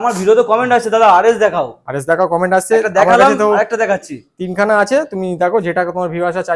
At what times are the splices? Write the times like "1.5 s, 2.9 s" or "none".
none